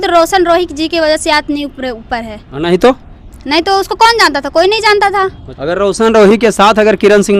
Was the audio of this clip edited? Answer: yes; 1 cut; at 5.5 s

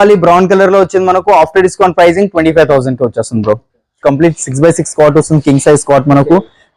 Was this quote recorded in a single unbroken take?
no; 1 cut; at 4.0 s

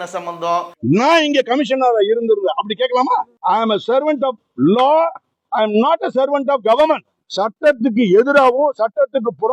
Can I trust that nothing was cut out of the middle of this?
yes; 0 cuts

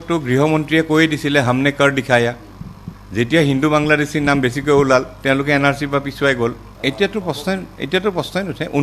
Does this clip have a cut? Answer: yes; 1 cut; at 6.7 s

